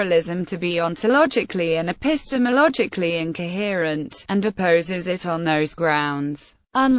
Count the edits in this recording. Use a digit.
1